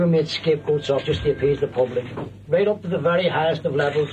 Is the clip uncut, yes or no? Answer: no